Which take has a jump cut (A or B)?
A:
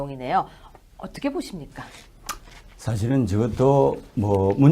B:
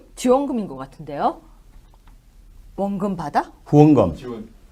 A